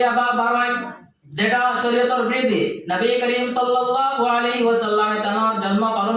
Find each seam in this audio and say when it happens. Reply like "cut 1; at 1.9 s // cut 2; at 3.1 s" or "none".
none